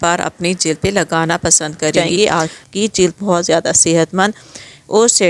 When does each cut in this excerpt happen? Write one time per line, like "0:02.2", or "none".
0:02.0